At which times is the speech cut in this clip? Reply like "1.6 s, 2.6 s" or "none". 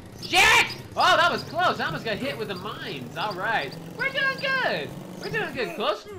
none